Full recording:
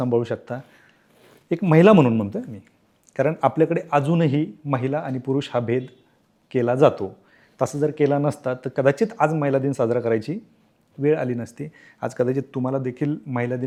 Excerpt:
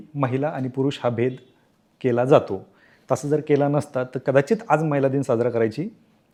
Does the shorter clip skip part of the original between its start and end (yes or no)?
no